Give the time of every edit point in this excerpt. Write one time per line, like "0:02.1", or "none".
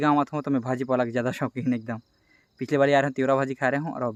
none